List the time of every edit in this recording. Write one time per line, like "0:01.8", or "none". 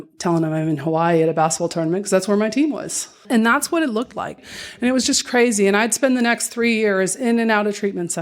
0:03.2
0:04.4